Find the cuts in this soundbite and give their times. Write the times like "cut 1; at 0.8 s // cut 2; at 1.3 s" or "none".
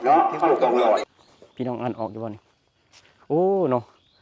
cut 1; at 1.2 s